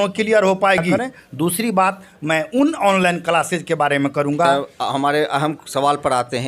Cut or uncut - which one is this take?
cut